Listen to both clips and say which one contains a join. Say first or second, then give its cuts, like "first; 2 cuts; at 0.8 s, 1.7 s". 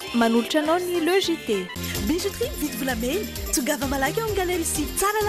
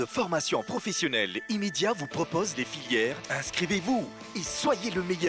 first; 1 cut; at 1.8 s